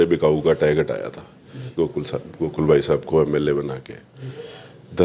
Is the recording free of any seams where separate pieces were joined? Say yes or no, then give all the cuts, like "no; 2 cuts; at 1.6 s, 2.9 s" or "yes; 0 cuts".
yes; 0 cuts